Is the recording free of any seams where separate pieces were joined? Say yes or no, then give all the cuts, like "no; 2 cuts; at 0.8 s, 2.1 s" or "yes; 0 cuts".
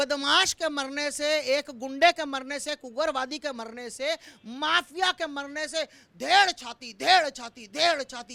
yes; 0 cuts